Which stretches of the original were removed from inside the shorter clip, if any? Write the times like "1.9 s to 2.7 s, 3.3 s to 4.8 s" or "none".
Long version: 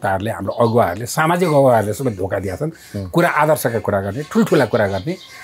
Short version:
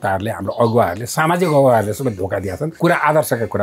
2.7 s to 3.0 s

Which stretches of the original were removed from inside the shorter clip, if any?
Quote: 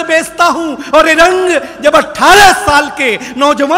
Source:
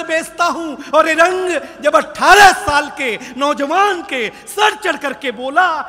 none

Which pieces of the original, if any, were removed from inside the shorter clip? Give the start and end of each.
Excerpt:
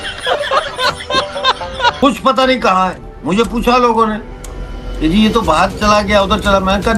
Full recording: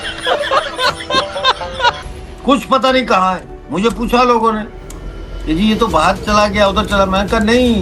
2.0 s to 2.4 s

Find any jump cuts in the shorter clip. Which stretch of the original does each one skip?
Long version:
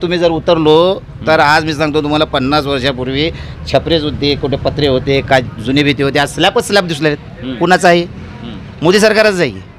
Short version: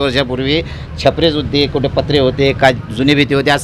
none

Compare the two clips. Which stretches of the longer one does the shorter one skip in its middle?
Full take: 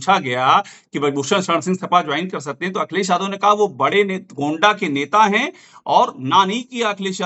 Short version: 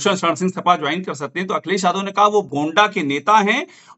3.7 s to 4.3 s

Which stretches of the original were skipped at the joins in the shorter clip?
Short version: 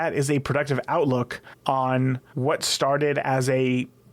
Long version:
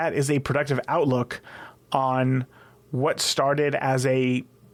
1.4 s to 1.7 s, 2.5 s to 2.8 s

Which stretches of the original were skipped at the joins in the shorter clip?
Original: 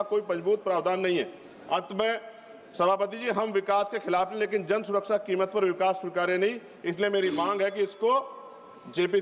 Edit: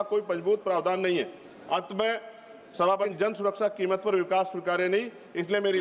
3.1 s to 4.6 s

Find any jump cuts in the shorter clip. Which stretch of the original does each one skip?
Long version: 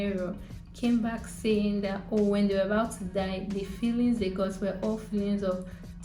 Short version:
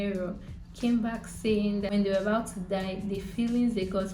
1.9 s to 2.4 s

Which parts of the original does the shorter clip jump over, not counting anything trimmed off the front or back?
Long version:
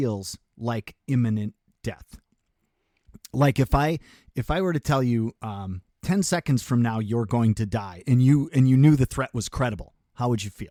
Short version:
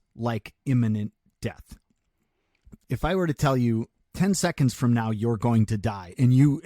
3.1 s to 4.2 s, 5.4 s to 5.9 s

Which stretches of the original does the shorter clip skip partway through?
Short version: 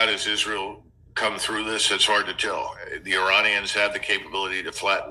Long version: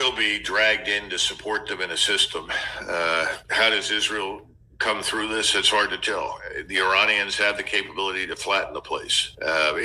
none

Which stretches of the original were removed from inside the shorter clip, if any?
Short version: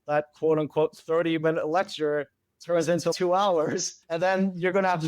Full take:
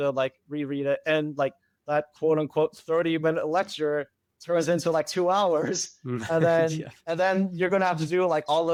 4.9 s to 5.1 s, 5.9 s to 6.9 s

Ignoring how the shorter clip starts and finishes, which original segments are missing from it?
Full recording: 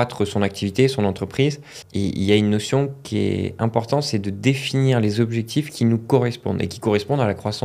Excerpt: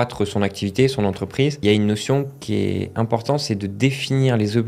1.6 s to 2.2 s

